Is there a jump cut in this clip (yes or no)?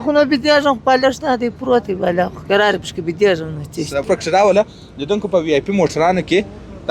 yes